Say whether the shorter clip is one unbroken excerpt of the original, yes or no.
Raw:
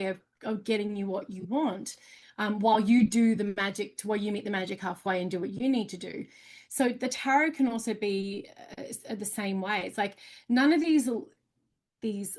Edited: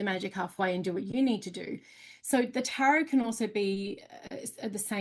yes